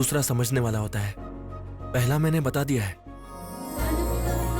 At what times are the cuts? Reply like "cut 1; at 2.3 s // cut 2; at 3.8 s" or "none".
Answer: cut 1; at 3.5 s

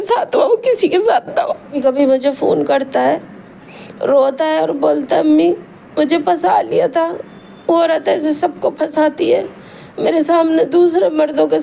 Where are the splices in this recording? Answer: cut 1; at 1.8 s

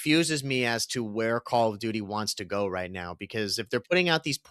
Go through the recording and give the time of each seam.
none

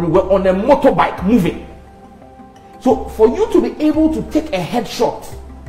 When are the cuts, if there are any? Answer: none

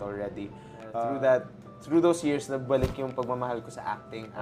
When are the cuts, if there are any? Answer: cut 1; at 1.0 s

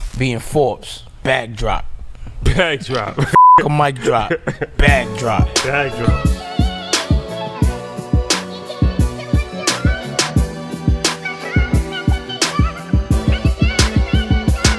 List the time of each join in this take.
none

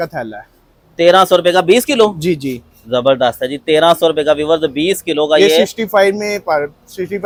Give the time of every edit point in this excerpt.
none

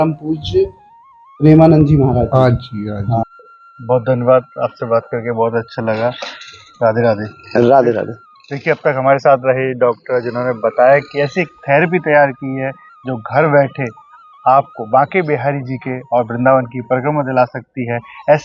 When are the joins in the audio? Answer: none

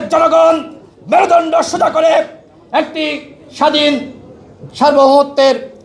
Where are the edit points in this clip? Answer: none

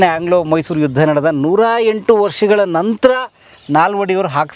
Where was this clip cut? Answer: none

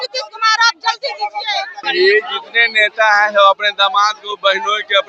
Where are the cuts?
cut 1; at 1.8 s

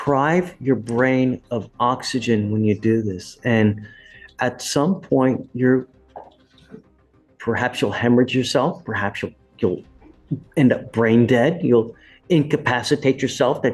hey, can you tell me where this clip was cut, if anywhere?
none

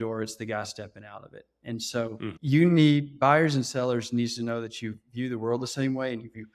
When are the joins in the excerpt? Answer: cut 1; at 2.4 s

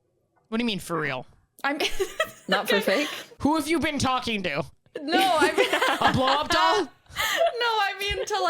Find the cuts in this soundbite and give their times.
cut 1; at 3.4 s

